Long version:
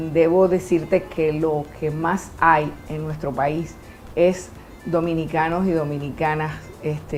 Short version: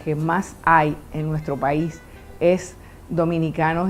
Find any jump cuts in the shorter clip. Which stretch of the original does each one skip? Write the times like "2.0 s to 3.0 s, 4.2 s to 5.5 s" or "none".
none